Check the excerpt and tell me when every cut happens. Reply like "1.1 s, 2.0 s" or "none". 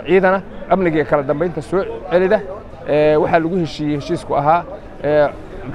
none